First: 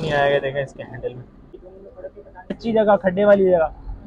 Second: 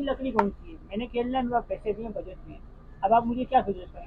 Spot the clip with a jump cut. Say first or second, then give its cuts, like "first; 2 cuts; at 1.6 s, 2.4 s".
first; 1 cut; at 2.0 s